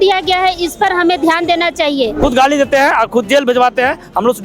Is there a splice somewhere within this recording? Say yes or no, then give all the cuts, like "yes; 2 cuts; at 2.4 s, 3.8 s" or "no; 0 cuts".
yes; 1 cut; at 2.2 s